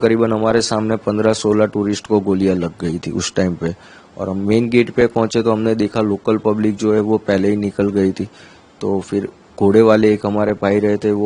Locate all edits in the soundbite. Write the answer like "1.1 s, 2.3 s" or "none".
none